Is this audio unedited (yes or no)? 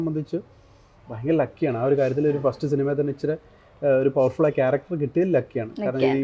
yes